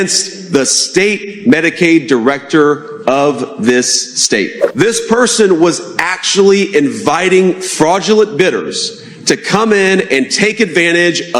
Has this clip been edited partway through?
yes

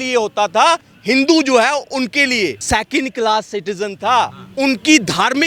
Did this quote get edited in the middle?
yes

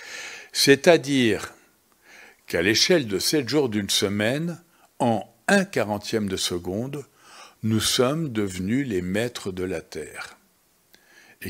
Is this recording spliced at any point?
no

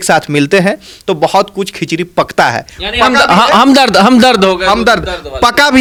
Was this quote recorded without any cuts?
yes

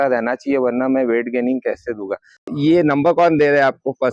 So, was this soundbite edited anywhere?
yes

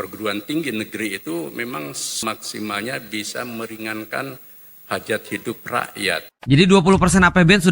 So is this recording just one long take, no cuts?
no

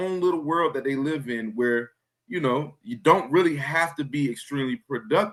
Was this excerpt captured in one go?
yes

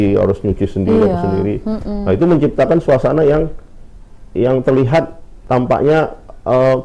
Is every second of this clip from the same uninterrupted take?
yes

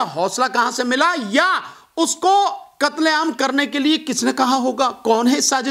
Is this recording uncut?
yes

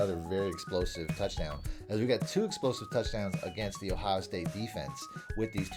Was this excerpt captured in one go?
yes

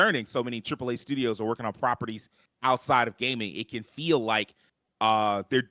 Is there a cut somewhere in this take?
no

